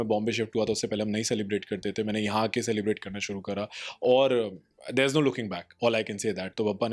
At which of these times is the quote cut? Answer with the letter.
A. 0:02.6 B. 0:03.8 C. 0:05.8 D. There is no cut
D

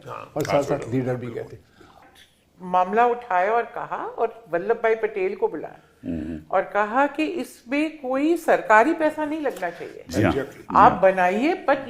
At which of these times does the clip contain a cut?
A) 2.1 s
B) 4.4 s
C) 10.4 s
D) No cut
A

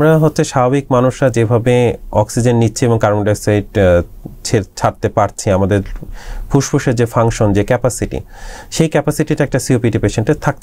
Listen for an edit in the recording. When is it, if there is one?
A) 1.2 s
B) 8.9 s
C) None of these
C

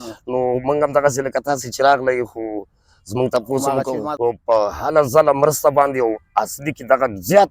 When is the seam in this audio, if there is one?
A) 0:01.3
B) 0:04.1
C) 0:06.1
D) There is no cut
B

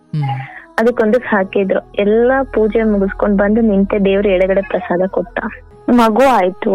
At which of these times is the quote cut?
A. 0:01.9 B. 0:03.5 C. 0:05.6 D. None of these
C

